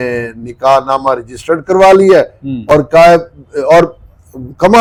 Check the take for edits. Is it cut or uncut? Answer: uncut